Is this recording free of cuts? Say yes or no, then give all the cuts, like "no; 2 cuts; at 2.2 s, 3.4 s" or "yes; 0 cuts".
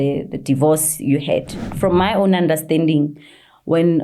no; 1 cut; at 1.6 s